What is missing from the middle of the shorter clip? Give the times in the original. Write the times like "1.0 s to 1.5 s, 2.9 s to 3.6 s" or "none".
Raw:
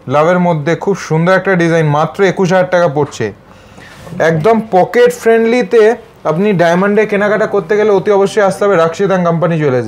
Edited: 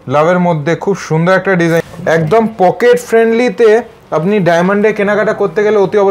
1.8 s to 4.0 s